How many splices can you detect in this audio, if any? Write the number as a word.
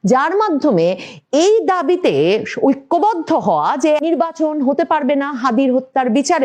one